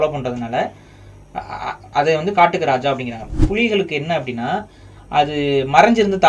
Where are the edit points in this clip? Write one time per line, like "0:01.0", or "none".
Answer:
0:01.9
0:03.3